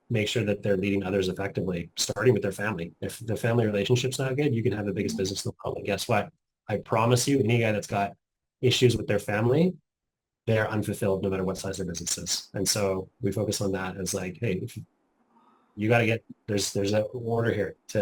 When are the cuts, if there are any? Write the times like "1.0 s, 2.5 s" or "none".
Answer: none